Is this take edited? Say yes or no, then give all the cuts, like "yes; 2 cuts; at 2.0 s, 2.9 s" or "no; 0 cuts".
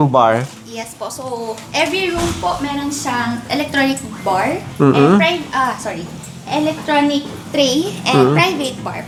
no; 0 cuts